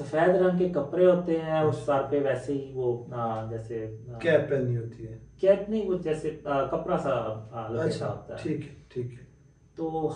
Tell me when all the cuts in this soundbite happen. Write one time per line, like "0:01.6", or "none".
none